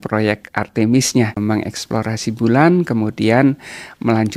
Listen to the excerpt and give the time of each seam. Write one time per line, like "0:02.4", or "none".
0:01.4